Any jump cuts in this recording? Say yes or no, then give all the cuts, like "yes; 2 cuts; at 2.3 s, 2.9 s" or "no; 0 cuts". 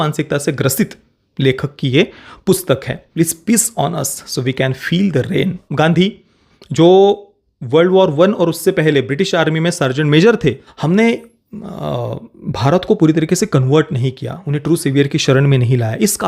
yes; 3 cuts; at 3.0 s, 5.6 s, 10.7 s